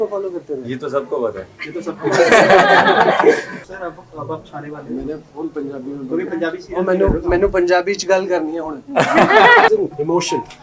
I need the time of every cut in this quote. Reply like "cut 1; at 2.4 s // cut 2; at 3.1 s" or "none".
cut 1; at 3.7 s // cut 2; at 9.7 s